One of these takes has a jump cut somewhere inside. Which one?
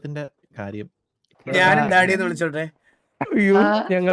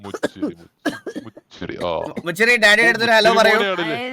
first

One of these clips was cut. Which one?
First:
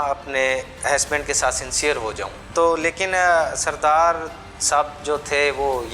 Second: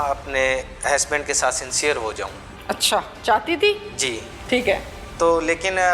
first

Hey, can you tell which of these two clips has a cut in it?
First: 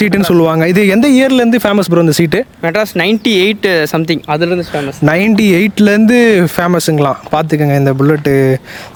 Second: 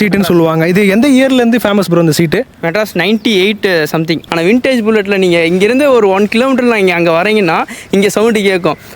second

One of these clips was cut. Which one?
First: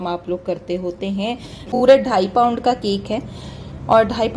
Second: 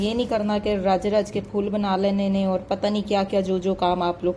first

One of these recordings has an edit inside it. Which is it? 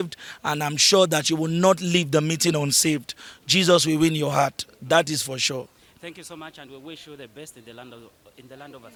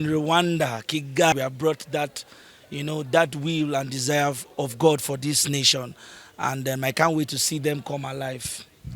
second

